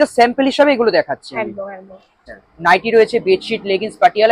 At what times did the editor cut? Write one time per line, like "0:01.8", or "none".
0:02.2